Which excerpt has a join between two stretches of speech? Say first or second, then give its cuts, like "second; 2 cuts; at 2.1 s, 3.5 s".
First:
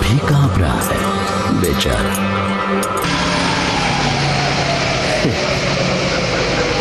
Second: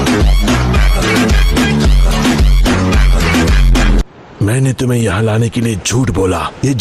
second; 1 cut; at 4.5 s